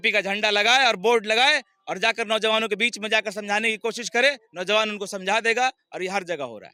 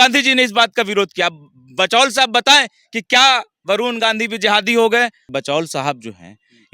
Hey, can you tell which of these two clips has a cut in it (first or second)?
second